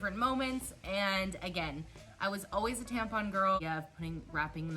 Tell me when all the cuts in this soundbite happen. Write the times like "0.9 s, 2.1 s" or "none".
3.6 s